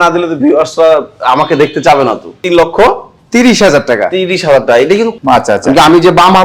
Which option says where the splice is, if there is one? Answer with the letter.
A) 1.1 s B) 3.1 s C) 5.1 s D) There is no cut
C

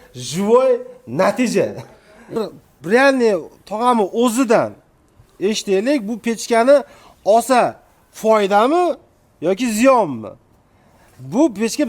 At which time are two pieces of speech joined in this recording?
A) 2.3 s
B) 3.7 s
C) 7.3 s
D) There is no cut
A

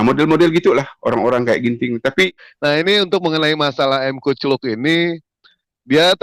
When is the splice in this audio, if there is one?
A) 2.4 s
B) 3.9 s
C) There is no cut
A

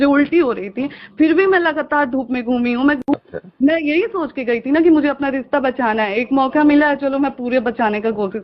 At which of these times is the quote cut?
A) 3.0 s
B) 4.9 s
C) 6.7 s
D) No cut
A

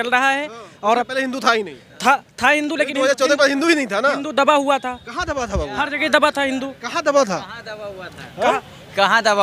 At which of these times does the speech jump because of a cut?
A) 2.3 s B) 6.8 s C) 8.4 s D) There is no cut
D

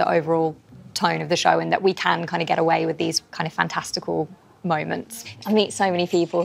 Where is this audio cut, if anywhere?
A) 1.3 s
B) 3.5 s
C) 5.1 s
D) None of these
C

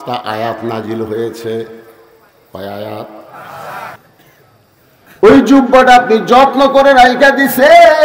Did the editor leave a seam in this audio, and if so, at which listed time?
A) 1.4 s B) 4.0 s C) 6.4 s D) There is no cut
B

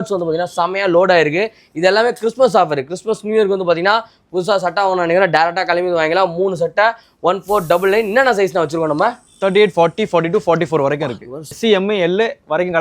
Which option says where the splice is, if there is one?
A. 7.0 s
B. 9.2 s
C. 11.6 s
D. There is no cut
C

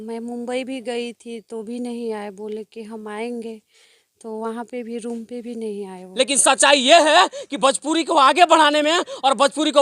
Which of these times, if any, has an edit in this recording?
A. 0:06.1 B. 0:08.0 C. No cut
A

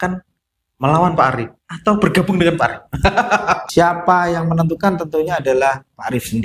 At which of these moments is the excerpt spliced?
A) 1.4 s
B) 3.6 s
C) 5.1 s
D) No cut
B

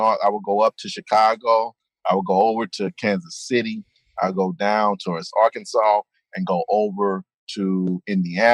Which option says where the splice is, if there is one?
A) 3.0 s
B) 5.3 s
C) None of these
B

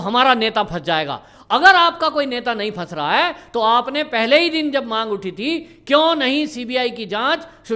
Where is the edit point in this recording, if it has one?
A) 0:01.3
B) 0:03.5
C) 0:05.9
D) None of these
D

